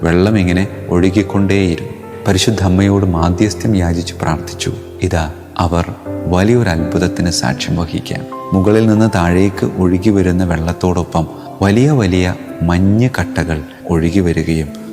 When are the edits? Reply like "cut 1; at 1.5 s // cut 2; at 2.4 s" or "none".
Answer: cut 1; at 2.0 s